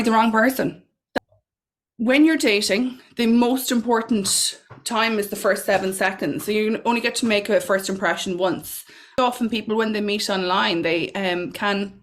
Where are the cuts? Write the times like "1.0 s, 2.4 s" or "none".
1.1 s, 9.2 s